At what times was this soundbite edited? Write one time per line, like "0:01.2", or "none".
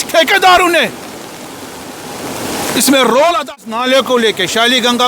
0:03.6